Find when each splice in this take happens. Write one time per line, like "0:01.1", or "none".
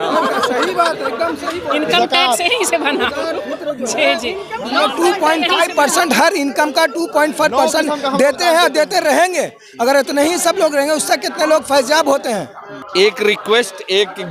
0:12.8